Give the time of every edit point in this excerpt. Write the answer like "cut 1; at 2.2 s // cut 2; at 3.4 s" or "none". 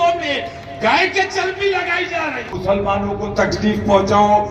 cut 1; at 2.5 s

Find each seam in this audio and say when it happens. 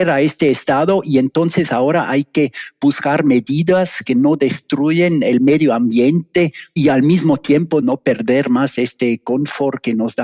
none

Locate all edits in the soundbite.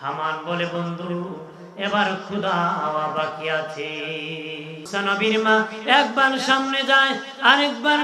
cut 1; at 4.9 s

